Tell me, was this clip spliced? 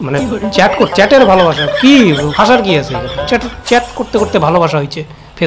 no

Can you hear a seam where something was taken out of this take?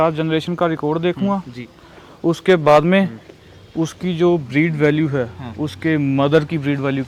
no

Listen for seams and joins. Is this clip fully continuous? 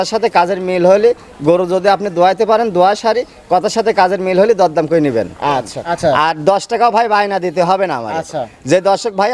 no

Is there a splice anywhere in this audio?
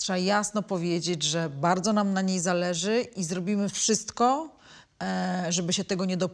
no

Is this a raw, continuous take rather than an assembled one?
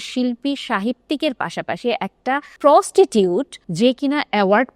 no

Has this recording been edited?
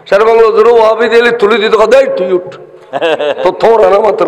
no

